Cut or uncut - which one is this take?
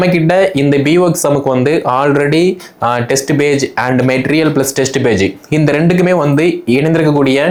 uncut